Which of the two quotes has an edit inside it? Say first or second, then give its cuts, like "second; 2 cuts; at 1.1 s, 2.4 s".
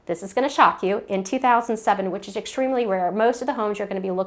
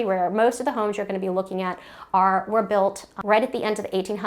second; 1 cut; at 3.1 s